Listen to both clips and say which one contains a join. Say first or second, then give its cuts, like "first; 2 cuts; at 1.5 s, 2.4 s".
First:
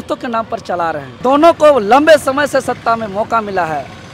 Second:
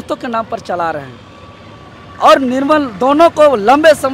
first; 1 cut; at 1.2 s